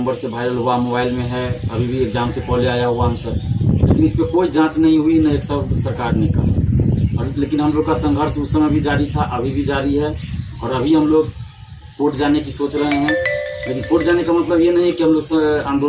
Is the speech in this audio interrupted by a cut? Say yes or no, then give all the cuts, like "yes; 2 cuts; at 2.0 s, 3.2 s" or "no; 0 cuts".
no; 0 cuts